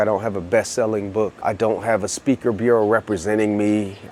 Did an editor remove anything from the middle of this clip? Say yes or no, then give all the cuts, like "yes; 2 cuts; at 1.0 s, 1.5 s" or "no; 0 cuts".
no; 0 cuts